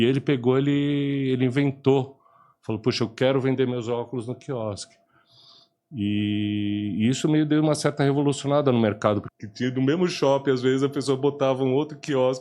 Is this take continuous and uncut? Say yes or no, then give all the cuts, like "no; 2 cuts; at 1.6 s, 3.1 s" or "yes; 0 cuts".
no; 1 cut; at 9.3 s